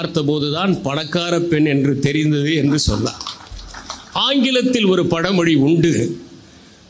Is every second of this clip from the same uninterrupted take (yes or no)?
yes